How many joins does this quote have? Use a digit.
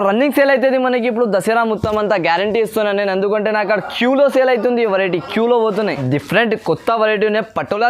1